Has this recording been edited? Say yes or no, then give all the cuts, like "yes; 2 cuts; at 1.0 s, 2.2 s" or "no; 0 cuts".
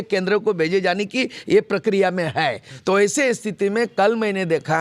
no; 0 cuts